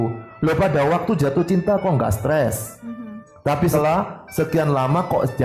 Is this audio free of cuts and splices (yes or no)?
no